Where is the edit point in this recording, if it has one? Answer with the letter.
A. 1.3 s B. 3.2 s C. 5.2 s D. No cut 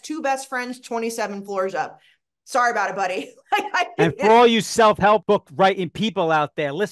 C